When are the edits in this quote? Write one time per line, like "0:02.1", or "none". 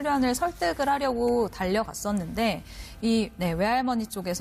0:02.8